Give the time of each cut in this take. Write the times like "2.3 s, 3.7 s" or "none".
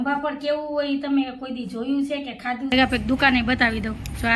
2.7 s